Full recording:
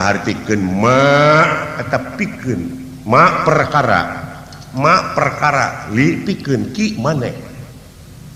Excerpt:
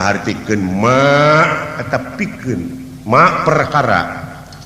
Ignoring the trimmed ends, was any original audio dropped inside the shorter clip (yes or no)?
no